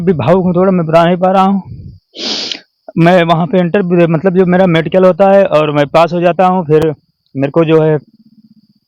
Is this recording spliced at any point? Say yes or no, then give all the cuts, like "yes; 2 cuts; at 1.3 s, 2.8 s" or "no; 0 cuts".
no; 0 cuts